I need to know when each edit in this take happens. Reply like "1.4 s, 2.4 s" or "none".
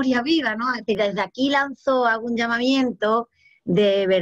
1.0 s